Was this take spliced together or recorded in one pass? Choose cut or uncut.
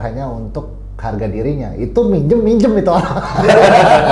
uncut